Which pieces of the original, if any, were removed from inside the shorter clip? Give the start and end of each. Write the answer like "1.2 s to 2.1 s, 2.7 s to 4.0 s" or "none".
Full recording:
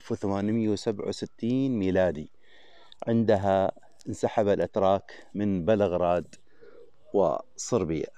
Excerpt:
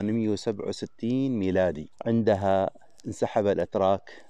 2.3 s to 2.9 s

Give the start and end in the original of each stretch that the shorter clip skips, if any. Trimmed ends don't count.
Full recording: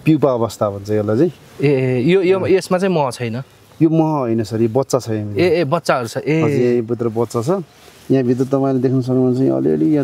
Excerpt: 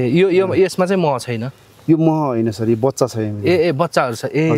none

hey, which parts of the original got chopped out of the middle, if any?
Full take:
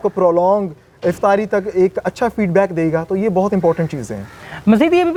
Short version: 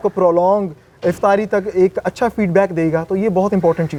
none

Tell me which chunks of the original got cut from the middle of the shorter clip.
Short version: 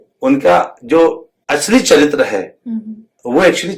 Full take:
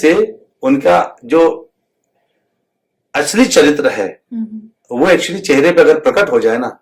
1.7 s to 3.0 s

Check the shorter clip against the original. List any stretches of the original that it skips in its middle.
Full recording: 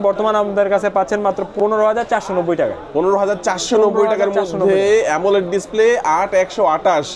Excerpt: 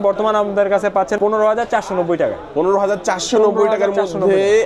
1.2 s to 1.5 s

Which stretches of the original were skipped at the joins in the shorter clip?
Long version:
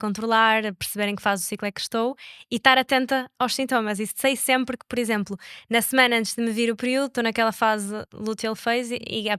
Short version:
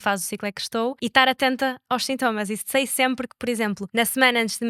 2.2 s to 2.5 s, 5.3 s to 5.6 s

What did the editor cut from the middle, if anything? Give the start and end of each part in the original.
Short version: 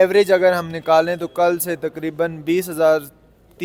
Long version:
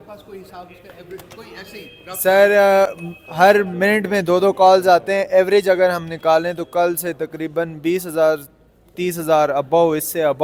none

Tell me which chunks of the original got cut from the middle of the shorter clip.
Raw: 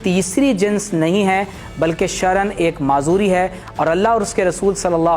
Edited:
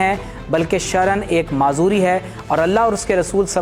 none

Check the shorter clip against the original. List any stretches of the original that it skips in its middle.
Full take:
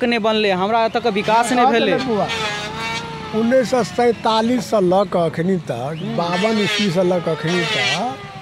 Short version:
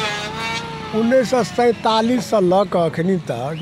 none

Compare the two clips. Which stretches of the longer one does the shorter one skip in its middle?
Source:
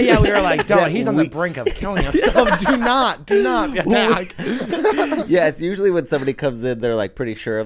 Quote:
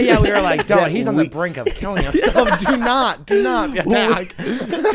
none

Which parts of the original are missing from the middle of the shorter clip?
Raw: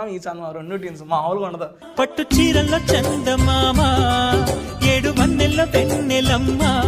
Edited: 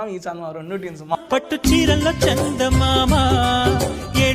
1.2 s to 1.8 s

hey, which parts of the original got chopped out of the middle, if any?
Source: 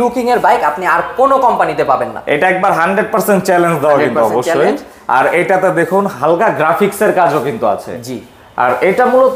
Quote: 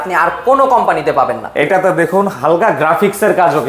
2.4 s to 5.5 s

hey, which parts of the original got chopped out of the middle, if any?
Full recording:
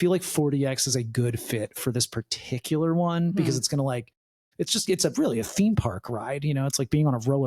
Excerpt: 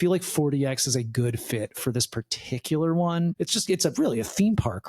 3.3 s to 4.5 s

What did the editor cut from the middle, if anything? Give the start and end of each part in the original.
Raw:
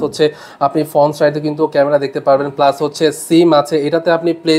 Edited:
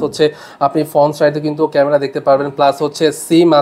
none

